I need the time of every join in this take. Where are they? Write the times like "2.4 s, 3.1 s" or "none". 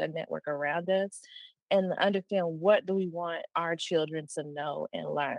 none